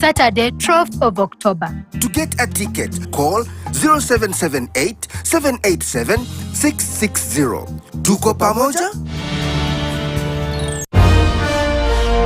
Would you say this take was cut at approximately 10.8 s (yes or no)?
yes